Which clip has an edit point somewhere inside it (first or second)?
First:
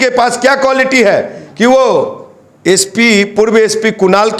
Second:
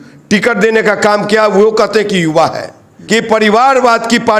second